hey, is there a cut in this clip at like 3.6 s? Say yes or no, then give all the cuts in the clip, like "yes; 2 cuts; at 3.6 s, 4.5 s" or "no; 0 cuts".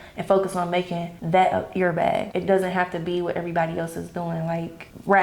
no; 2 cuts; at 1.1 s, 2.3 s